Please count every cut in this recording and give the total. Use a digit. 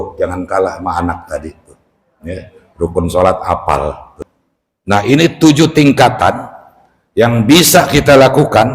1